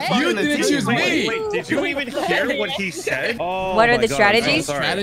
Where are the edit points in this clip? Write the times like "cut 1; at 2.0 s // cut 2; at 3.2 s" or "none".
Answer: cut 1; at 3.4 s